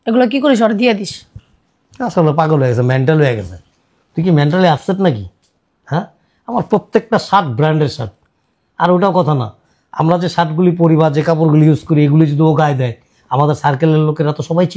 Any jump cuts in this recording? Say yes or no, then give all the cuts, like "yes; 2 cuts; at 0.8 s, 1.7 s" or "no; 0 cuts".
no; 0 cuts